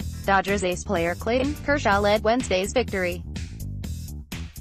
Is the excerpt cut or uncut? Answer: cut